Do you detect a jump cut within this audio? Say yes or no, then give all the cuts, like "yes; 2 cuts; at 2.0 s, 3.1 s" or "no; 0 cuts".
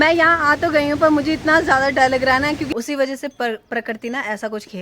yes; 1 cut; at 2.6 s